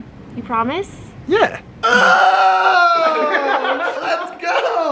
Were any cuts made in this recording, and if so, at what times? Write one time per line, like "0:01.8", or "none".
0:04.0